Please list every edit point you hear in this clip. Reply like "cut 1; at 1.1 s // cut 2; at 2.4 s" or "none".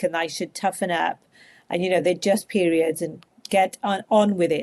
cut 1; at 3.4 s